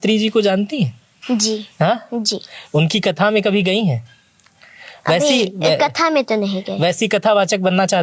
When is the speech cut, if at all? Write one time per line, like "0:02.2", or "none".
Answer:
none